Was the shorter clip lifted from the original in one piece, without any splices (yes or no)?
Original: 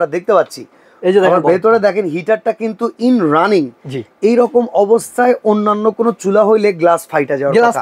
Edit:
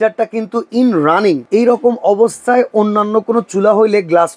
no